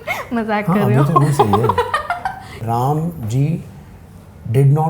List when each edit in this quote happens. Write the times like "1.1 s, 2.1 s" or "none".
2.6 s